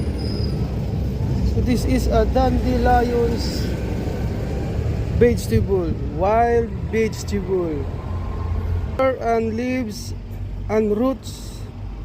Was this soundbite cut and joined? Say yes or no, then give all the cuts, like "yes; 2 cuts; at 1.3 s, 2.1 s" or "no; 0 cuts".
yes; 1 cut; at 9.0 s